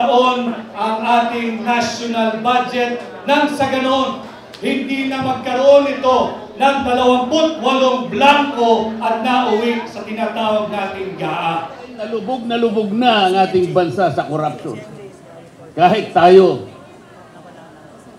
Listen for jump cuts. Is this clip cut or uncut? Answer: cut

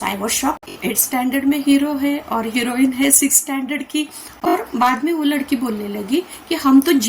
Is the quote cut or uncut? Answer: cut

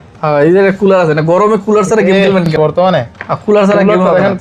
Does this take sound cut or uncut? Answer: cut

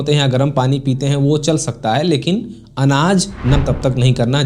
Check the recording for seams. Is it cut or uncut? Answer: cut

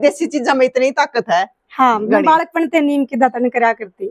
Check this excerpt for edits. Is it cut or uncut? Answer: uncut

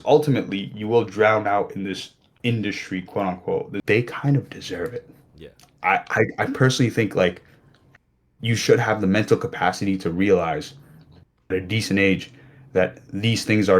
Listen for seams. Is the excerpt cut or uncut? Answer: cut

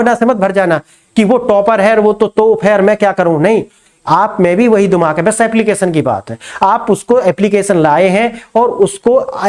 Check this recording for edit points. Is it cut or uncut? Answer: uncut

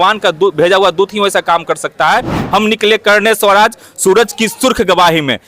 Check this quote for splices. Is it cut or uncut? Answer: cut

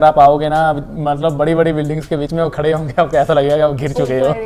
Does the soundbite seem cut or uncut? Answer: uncut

